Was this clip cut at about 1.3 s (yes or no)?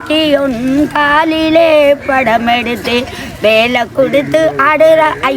no